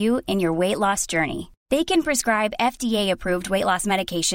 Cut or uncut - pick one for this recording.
uncut